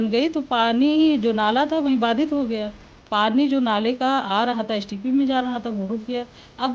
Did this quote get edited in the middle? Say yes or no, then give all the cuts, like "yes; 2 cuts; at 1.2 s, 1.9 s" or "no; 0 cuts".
no; 0 cuts